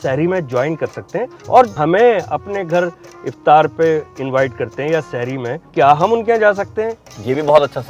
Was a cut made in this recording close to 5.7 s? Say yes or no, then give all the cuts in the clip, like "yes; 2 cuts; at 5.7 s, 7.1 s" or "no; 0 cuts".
yes; 2 cuts; at 1.6 s, 5.7 s